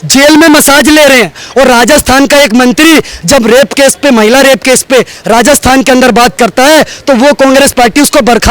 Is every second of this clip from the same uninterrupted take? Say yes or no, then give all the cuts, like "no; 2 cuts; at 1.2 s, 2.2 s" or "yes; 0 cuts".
no; 1 cut; at 1.4 s